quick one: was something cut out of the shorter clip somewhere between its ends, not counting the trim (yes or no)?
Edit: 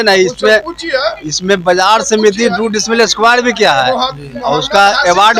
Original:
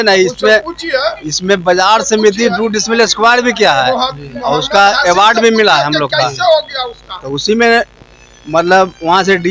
no